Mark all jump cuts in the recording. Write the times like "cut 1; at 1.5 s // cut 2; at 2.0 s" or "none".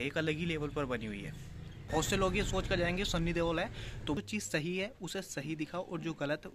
cut 1; at 2.0 s // cut 2; at 4.1 s